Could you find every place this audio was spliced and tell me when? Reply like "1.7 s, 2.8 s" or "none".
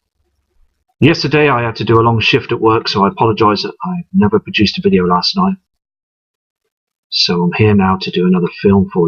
none